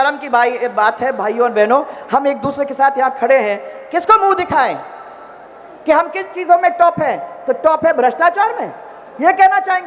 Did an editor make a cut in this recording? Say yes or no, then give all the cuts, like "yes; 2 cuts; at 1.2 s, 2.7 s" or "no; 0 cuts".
no; 0 cuts